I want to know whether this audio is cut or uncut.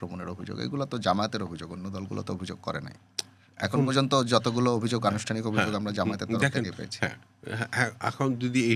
uncut